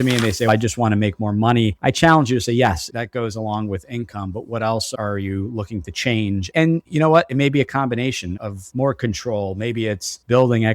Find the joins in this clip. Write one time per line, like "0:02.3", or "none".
0:01.8
0:06.6